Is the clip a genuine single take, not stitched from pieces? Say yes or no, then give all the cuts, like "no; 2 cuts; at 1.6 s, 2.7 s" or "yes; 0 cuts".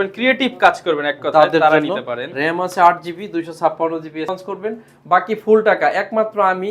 no; 1 cut; at 4.3 s